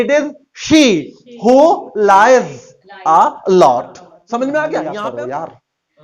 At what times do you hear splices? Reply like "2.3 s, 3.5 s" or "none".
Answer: 4.9 s